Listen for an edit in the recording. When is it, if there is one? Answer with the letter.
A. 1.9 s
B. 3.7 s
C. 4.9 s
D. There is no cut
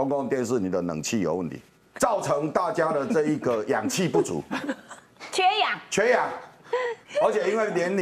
A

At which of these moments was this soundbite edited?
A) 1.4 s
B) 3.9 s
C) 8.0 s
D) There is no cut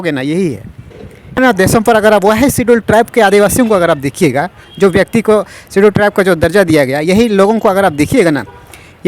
A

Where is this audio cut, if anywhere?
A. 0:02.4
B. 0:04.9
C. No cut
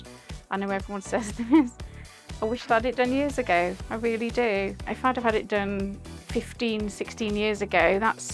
B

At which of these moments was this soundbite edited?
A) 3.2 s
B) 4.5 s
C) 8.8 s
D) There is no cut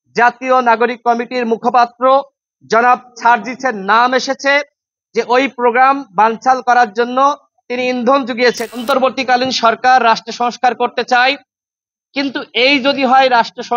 C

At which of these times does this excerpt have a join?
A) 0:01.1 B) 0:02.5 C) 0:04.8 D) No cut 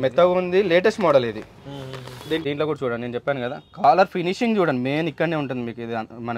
B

